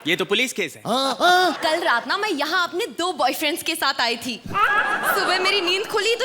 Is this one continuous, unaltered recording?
no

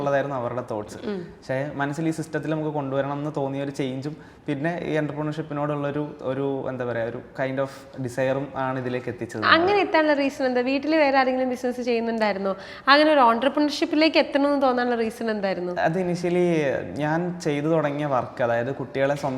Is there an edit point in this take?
no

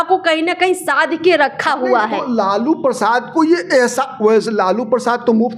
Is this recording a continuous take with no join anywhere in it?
yes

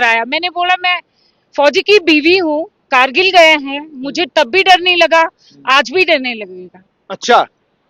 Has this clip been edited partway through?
no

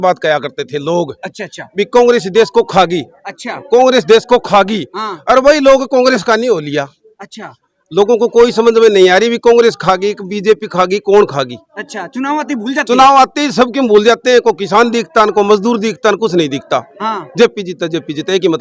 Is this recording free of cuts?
yes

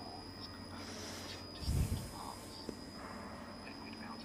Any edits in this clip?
no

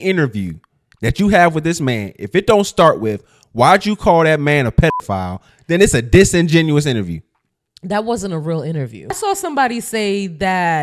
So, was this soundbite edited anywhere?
yes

